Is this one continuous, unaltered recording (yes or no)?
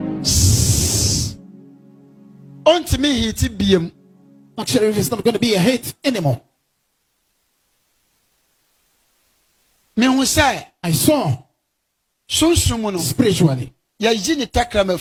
yes